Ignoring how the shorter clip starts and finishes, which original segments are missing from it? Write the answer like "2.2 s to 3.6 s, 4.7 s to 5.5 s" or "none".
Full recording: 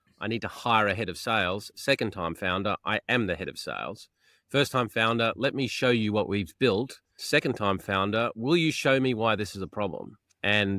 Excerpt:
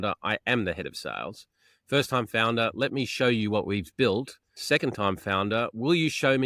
none